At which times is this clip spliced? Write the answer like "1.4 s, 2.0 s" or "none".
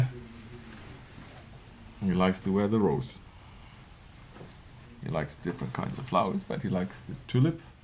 3.0 s